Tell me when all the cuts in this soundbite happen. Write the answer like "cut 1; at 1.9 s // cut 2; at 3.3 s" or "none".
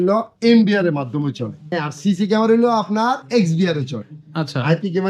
cut 1; at 1.8 s